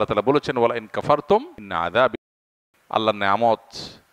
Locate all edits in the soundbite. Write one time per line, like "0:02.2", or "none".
0:01.6
0:02.3